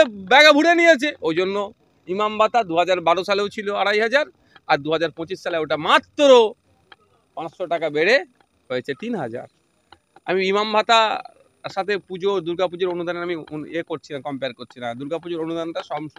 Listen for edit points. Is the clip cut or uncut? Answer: uncut